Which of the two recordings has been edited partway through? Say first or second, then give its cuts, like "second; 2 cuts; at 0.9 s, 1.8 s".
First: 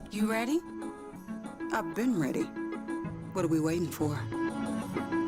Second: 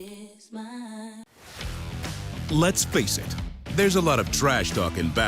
second; 1 cut; at 1.3 s